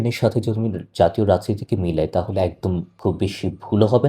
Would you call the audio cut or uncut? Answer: cut